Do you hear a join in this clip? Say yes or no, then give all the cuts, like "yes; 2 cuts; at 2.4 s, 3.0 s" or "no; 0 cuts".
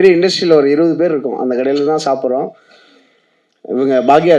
no; 0 cuts